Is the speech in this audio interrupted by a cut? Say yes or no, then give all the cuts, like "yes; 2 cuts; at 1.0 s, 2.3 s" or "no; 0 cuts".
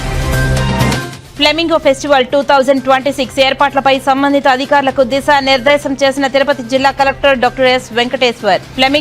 yes; 1 cut; at 1.1 s